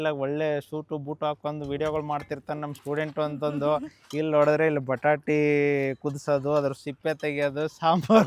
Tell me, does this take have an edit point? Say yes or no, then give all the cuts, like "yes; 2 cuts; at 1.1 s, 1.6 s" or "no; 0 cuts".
no; 0 cuts